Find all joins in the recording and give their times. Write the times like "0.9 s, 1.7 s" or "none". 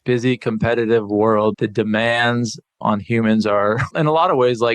1.5 s, 2.8 s, 3.9 s

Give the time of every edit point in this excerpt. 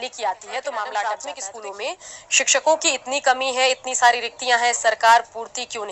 1.4 s

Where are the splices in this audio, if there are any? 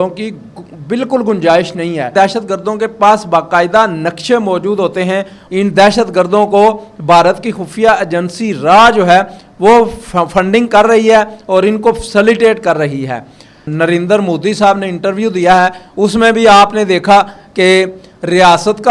2.1 s, 5.4 s, 13.6 s

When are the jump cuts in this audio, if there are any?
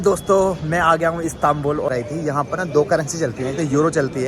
1.9 s

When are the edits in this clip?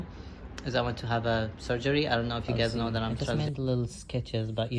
3.3 s

